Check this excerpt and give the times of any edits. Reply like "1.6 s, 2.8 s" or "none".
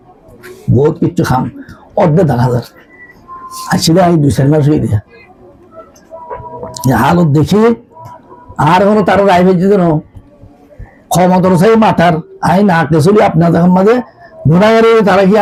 none